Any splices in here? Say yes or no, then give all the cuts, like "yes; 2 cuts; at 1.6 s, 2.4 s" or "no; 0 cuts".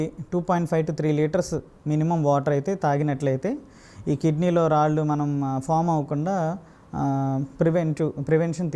no; 0 cuts